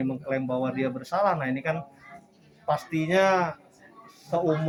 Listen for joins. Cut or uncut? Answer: uncut